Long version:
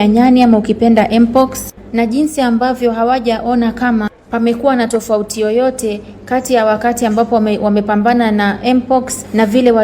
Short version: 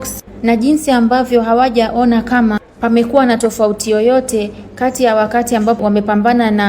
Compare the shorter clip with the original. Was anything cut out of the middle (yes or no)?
yes